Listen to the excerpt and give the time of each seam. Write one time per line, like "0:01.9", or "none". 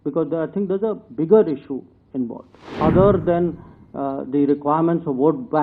0:02.7

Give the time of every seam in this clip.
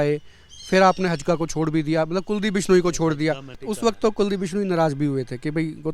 0:03.7

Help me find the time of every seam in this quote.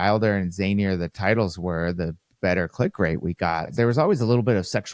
0:03.7

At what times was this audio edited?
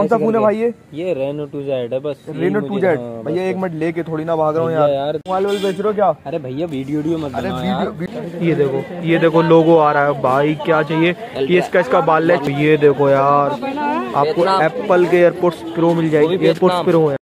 0:05.2
0:08.0
0:12.5

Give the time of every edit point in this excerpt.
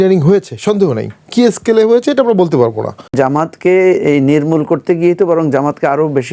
0:03.1

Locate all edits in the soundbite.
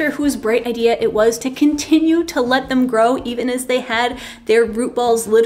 0:01.5

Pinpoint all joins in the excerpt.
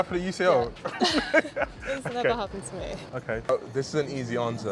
none

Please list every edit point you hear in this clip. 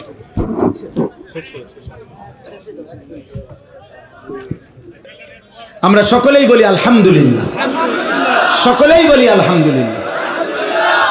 0:05.1

